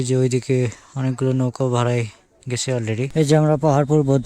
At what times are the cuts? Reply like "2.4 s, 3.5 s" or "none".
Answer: 3.1 s